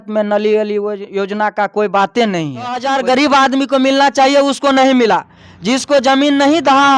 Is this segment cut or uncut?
cut